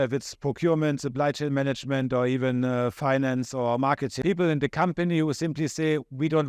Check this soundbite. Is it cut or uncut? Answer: cut